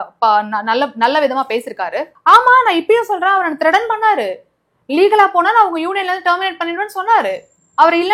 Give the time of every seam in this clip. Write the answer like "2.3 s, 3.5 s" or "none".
2.1 s